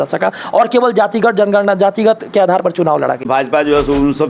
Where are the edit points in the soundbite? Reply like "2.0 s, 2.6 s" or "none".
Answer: 3.3 s